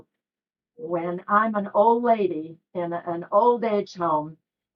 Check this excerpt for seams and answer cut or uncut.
uncut